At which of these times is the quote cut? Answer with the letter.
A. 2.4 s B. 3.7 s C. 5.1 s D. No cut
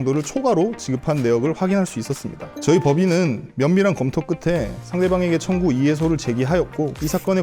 A